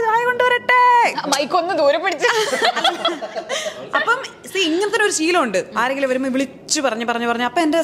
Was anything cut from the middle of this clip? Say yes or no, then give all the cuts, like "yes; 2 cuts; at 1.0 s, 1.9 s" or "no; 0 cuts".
no; 0 cuts